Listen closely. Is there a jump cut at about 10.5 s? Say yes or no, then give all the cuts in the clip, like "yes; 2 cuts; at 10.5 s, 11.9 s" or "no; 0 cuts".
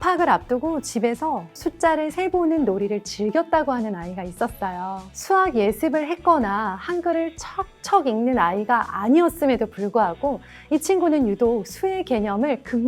no; 2 cuts; at 1.5 s, 5.1 s